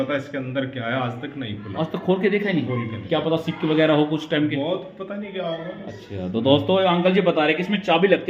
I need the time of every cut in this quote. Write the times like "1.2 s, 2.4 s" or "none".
none

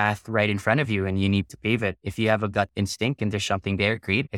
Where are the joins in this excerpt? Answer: none

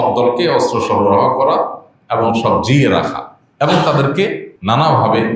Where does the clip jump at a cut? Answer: 4.5 s

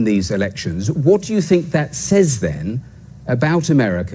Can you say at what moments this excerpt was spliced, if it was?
none

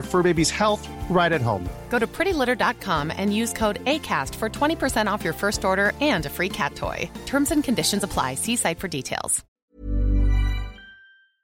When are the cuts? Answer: 9.5 s

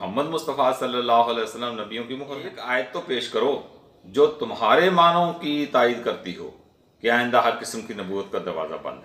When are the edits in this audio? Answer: 2.6 s

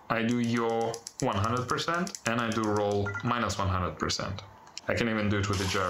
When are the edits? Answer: 2.2 s, 4.7 s

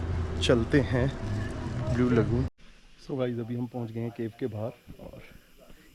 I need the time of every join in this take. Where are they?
2.6 s

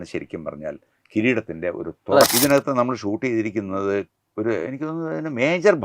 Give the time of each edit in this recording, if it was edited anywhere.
2.3 s

